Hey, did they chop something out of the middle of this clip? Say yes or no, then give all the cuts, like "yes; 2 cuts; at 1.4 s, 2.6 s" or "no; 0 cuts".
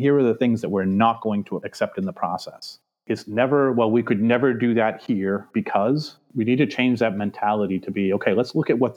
yes; 1 cut; at 2.9 s